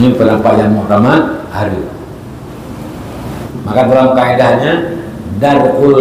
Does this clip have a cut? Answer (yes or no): yes